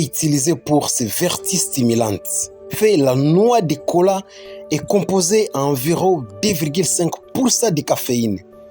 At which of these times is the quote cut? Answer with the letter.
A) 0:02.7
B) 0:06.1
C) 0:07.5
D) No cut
A